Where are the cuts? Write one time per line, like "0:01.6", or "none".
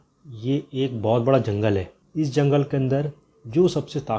0:02.0